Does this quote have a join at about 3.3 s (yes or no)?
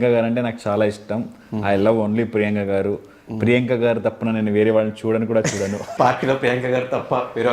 no